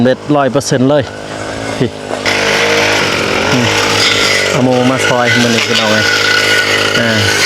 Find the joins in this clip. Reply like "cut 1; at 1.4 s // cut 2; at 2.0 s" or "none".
cut 1; at 2.3 s